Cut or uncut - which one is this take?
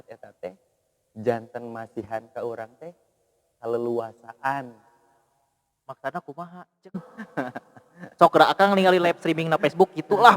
cut